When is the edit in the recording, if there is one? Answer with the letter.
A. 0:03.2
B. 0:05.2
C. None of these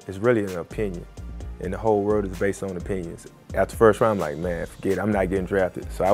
A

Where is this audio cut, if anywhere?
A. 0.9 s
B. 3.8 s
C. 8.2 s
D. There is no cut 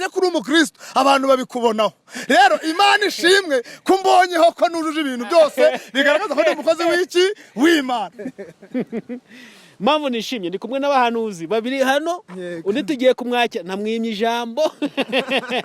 C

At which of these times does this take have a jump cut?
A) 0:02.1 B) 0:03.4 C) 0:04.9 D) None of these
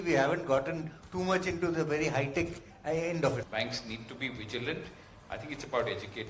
B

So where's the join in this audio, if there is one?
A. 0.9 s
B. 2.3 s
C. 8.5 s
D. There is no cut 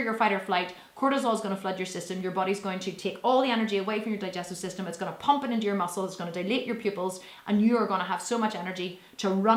D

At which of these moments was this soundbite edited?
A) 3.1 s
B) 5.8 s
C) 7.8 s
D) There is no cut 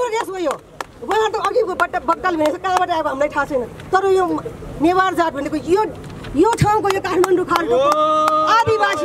D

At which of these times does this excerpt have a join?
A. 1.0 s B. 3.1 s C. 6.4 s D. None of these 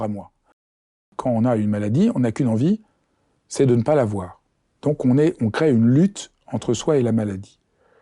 A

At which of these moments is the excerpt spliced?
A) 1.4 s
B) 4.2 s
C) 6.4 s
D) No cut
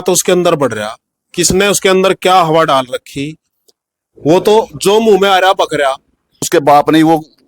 C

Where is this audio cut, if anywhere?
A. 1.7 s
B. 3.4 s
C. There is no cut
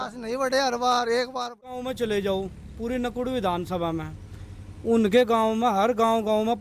A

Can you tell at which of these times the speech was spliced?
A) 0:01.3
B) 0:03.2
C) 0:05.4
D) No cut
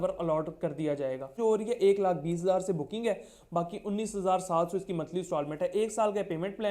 A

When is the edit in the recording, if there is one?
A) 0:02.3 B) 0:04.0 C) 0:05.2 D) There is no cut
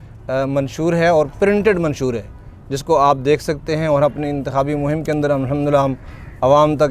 D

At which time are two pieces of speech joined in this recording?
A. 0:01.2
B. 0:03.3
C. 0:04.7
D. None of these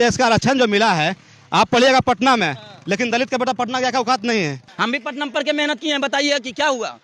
C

